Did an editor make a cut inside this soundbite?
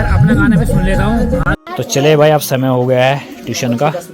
yes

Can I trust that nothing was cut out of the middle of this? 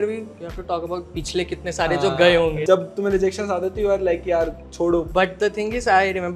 no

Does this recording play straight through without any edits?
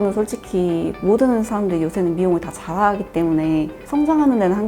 no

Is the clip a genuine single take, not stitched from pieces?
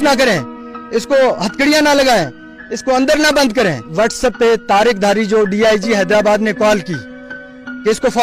no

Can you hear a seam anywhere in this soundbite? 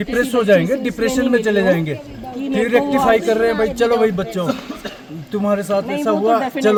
no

